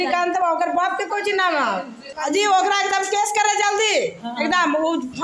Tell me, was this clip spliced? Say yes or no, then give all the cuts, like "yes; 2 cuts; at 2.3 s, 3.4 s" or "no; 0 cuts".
yes; 1 cut; at 2.0 s